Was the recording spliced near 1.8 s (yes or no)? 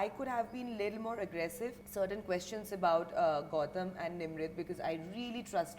yes